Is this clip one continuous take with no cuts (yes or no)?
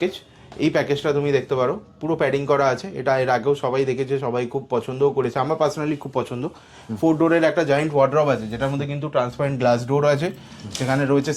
yes